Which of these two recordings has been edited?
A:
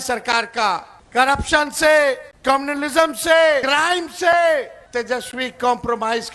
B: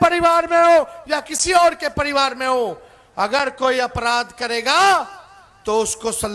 A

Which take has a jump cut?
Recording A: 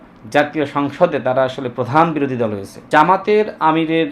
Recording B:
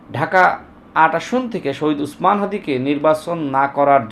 A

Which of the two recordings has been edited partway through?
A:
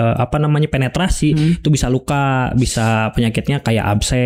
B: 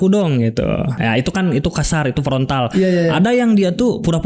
B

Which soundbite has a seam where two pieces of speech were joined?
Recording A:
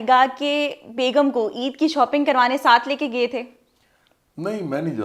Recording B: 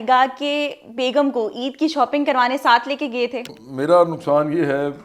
B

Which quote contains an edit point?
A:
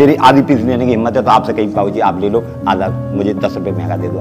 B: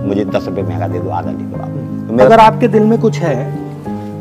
B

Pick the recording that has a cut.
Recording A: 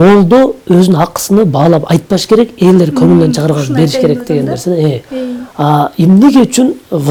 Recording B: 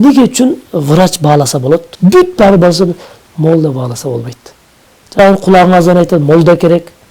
B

